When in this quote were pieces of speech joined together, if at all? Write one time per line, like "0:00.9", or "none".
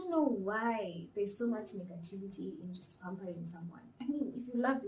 none